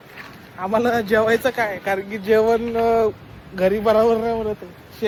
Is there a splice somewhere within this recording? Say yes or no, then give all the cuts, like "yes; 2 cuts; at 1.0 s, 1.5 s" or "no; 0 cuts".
no; 0 cuts